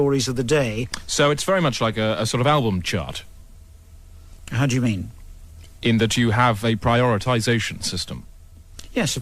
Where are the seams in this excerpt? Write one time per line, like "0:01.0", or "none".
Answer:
0:02.5

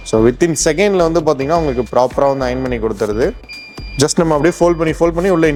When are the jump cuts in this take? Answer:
none

